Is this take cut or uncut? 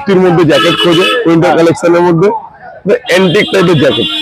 uncut